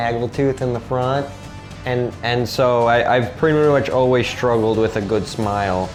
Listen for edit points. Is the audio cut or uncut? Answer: uncut